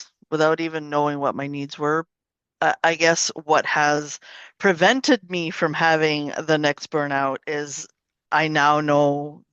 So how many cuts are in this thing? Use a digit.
1